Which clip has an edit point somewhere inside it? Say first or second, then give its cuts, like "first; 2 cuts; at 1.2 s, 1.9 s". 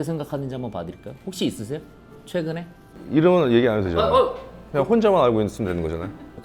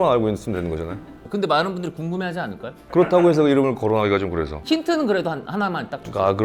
first; 1 cut; at 2.9 s